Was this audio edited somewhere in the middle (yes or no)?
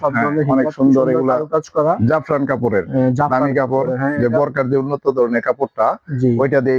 no